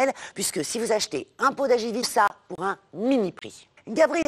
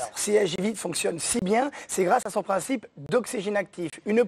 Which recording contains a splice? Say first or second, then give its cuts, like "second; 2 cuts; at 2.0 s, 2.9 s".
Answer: first; 1 cut; at 2.1 s